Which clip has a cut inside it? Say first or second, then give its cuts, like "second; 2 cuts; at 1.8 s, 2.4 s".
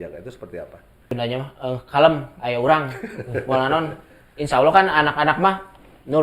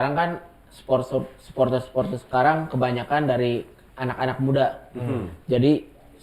first; 1 cut; at 1.1 s